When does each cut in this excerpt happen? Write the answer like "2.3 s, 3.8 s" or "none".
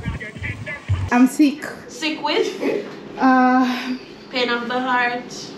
1.0 s